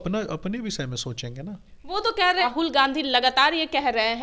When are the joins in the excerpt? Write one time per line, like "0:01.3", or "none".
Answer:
0:02.4